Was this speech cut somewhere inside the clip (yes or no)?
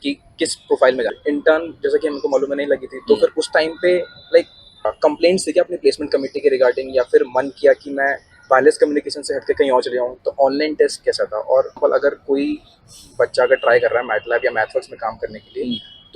yes